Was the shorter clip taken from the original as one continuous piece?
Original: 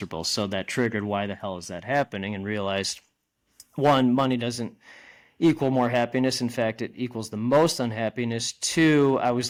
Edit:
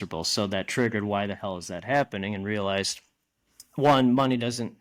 yes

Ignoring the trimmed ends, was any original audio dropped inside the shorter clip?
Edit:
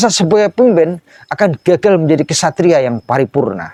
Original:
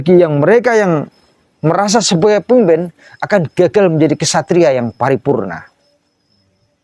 no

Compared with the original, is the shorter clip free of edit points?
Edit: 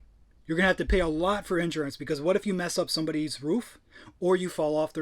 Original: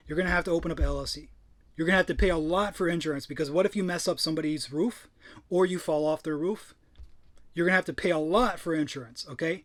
yes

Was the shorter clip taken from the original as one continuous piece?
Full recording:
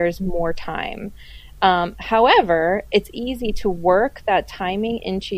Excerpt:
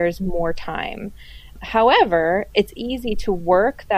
no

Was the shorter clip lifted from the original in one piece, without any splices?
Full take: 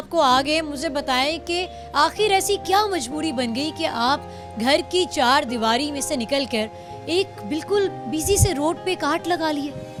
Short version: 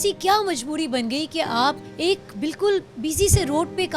no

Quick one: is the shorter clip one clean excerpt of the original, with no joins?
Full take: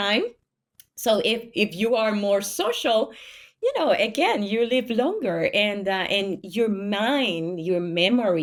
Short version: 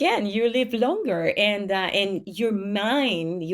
yes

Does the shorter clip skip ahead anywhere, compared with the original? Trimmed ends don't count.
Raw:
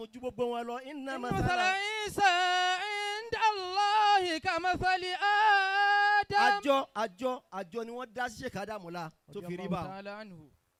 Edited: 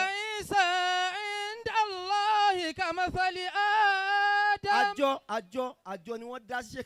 no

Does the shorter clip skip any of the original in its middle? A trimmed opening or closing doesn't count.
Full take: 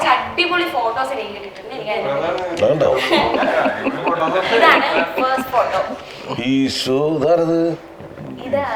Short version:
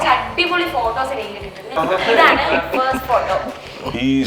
yes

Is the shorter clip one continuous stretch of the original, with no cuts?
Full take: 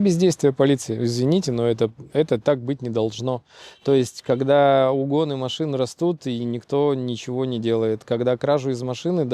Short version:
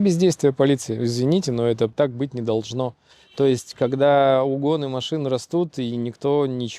no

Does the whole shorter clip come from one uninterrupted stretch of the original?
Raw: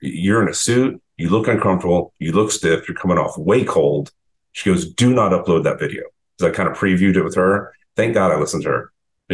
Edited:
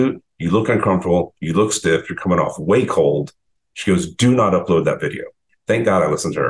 no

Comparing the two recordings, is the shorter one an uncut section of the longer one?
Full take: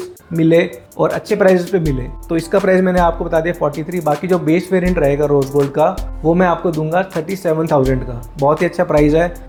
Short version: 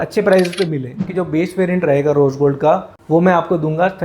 no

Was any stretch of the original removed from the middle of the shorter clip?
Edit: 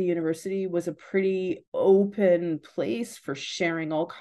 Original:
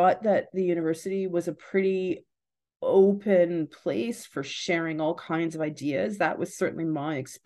yes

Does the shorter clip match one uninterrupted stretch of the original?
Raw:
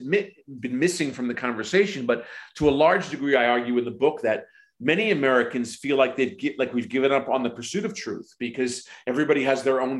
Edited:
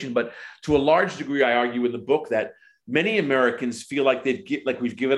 yes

